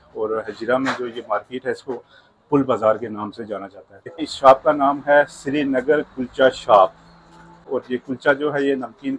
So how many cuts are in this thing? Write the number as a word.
two